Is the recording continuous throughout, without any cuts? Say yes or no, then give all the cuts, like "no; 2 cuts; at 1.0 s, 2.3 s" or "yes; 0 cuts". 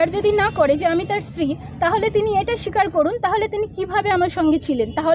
yes; 0 cuts